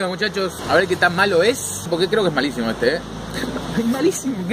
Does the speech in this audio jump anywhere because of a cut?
no; 0 cuts

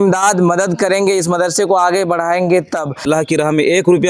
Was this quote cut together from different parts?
yes; 1 cut; at 2.9 s

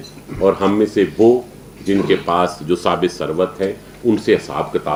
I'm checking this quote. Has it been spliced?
no; 0 cuts

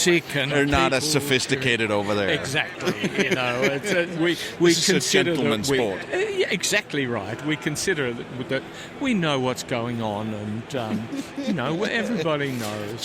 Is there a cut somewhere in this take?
no; 0 cuts

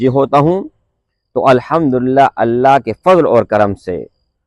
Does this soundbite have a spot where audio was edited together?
no; 0 cuts

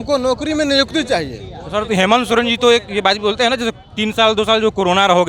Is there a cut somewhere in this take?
no; 0 cuts

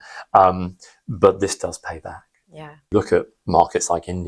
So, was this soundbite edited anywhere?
yes; 1 cut; at 2.8 s

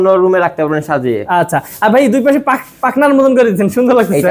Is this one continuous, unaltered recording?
yes; 0 cuts

